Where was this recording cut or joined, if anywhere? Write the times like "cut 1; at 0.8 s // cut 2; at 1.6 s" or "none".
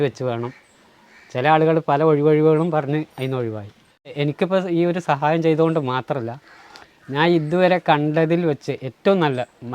cut 1; at 4.1 s